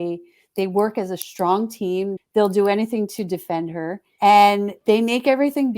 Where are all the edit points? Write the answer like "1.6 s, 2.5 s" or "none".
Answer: 2.2 s, 4.0 s, 4.7 s